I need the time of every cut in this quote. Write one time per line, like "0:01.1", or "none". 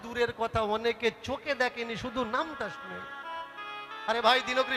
none